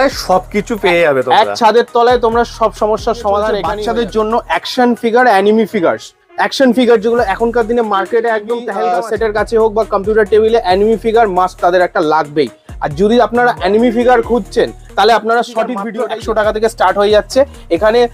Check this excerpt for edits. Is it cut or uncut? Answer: cut